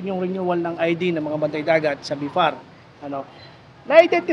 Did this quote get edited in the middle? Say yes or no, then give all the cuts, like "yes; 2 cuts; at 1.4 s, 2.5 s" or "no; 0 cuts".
no; 0 cuts